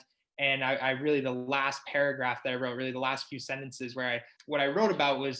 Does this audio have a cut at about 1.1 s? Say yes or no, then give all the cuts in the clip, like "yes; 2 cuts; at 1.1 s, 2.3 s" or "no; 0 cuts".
no; 1 cut; at 4.3 s